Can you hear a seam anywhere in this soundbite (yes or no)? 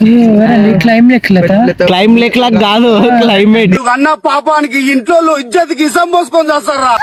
no